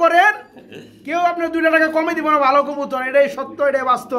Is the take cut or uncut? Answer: uncut